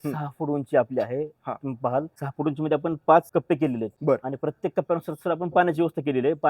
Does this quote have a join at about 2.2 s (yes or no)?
yes